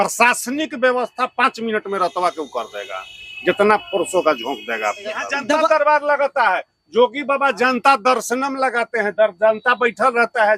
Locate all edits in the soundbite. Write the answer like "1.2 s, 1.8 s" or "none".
5.3 s